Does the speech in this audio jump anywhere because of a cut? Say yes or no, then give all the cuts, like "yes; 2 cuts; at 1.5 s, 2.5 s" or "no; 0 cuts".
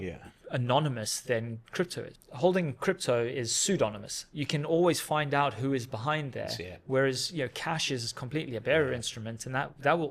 yes; 1 cut; at 2.1 s